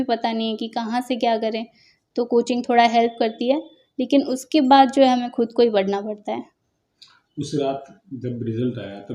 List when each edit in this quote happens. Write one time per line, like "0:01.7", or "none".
none